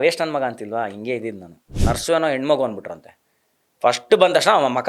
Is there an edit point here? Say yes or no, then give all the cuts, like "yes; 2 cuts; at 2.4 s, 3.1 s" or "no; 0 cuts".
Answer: yes; 1 cut; at 1.7 s